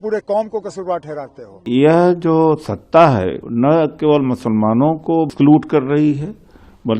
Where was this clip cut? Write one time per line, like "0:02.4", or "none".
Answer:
0:01.6
0:03.4
0:05.3